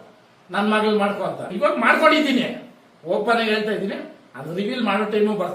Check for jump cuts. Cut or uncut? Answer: cut